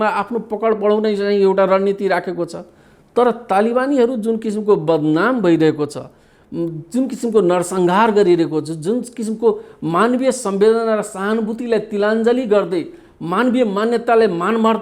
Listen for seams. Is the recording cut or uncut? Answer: uncut